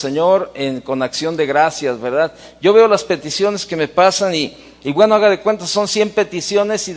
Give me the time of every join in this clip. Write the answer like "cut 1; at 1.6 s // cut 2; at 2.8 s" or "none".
cut 1; at 3.3 s